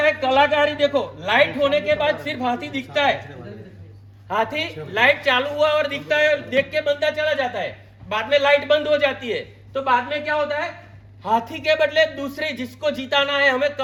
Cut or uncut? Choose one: uncut